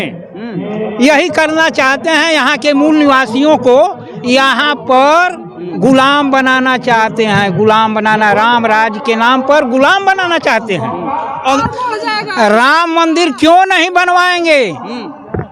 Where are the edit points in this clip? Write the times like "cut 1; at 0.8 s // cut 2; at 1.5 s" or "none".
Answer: cut 1; at 11.6 s